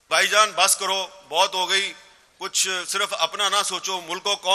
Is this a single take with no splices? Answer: yes; 0 cuts

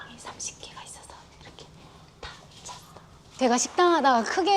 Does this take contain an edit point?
yes; 1 cut; at 3.4 s

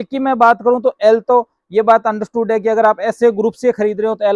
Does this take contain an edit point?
no; 0 cuts

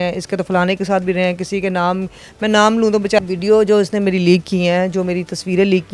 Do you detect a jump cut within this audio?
yes; 1 cut; at 3.2 s

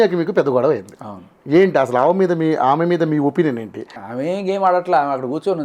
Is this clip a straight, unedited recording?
no; 1 cut; at 4.0 s

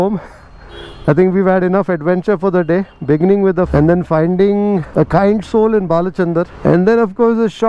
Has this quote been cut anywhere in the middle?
yes; 3 cuts; at 3.7 s, 4.9 s, 6.5 s

